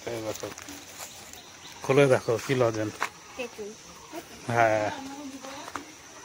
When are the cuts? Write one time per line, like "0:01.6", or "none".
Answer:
none